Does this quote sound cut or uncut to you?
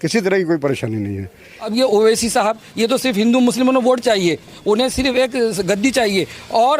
cut